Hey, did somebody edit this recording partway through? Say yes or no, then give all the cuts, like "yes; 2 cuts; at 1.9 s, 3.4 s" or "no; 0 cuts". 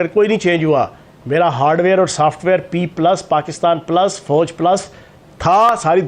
no; 0 cuts